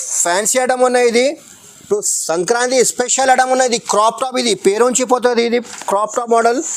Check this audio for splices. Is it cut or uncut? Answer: uncut